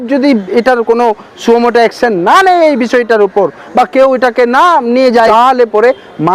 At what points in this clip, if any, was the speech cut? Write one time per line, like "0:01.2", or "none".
0:05.3